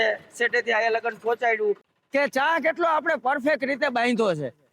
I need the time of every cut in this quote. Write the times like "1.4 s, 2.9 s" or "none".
1.9 s